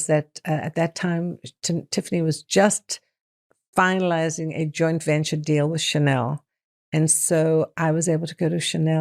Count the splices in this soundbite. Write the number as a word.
zero